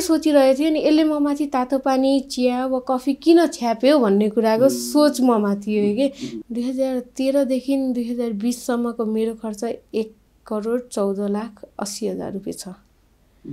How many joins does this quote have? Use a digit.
1